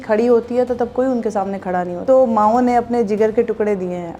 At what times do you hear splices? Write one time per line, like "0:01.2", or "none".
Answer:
0:02.0